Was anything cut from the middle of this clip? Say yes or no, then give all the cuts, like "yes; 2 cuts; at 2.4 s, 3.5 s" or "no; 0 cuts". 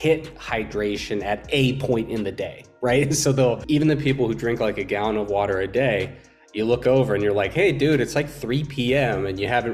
yes; 1 cut; at 3.6 s